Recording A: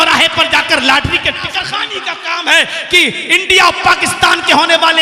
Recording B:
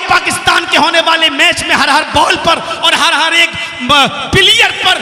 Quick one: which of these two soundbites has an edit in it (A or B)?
A